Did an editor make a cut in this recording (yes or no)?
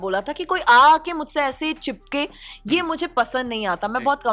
no